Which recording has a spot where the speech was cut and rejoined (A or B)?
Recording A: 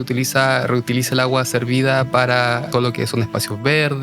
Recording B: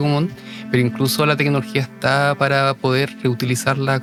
A